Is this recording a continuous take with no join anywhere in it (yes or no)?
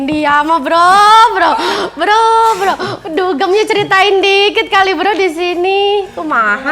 yes